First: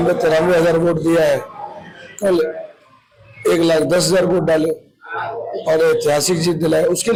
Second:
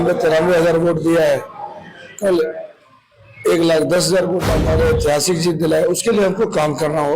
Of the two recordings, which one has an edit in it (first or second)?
second